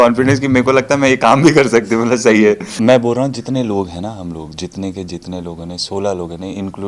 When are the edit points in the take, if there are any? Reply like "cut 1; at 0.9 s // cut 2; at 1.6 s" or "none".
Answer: cut 1; at 2.7 s